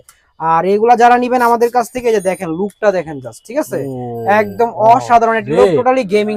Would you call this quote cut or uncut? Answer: uncut